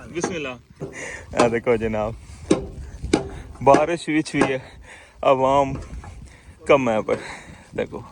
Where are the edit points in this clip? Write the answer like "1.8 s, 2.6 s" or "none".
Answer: 0.9 s